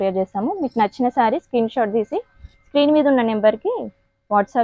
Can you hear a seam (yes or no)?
no